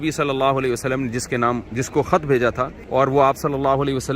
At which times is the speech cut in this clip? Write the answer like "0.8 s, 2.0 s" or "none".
1.7 s, 2.8 s